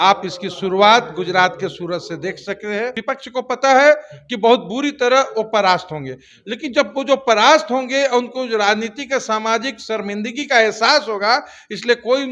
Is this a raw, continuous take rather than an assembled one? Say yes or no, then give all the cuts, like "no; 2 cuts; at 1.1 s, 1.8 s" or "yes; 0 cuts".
no; 1 cut; at 3.0 s